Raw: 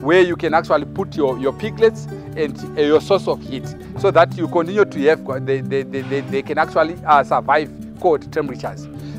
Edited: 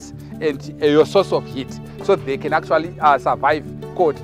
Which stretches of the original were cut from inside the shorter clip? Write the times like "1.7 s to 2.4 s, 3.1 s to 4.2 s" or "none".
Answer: 4.1 s to 6.2 s